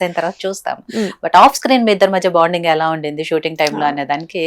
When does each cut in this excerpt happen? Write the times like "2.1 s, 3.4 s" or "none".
none